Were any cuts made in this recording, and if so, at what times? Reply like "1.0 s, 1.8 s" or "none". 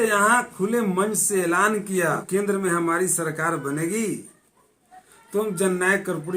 2.2 s